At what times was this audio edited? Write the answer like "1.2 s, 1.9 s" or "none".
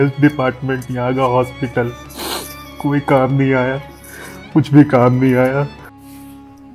5.8 s